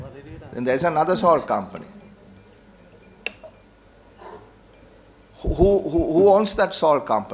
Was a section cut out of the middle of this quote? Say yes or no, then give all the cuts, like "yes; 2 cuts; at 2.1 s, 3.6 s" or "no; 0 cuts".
no; 0 cuts